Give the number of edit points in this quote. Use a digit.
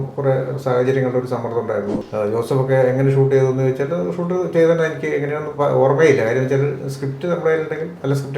1